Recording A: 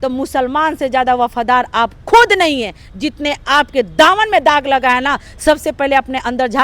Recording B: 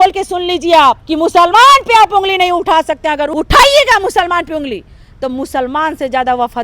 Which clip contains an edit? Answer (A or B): B